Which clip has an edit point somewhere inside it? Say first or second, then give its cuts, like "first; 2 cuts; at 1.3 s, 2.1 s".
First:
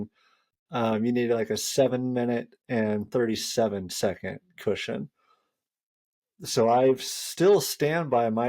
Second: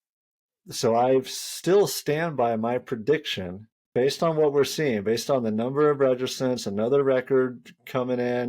second; 1 cut; at 3.8 s